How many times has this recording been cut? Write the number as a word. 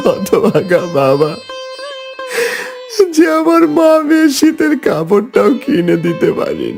zero